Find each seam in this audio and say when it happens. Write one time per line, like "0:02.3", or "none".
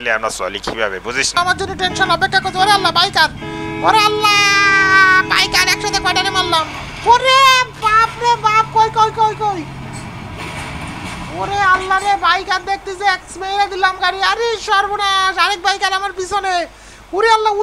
0:01.4